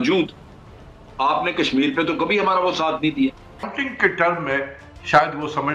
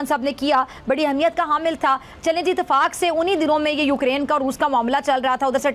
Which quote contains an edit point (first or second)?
first